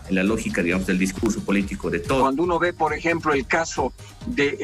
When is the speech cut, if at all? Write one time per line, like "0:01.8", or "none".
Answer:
0:02.2